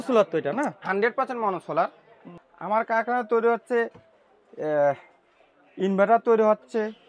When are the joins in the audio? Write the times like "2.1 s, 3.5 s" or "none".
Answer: none